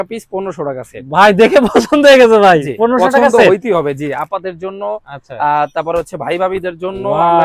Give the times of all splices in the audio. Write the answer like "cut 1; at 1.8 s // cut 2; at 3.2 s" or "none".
none